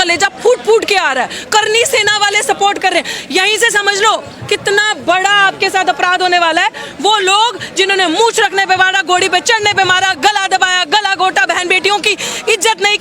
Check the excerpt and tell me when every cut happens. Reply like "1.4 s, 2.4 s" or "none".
none